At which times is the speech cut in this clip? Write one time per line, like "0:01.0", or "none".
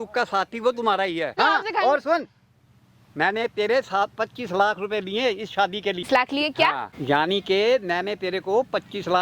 0:01.4
0:06.1
0:06.9